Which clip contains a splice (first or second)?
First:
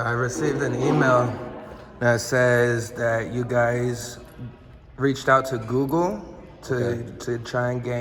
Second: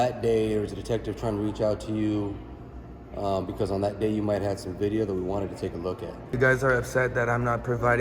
second